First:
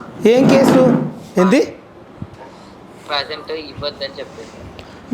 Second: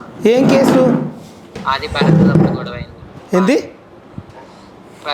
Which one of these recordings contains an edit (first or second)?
first